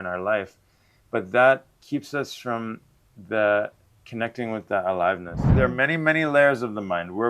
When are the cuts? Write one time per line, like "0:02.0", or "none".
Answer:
0:01.7
0:05.5